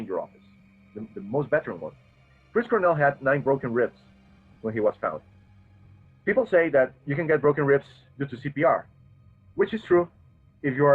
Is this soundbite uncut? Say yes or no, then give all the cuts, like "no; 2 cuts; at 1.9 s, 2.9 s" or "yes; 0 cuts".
yes; 0 cuts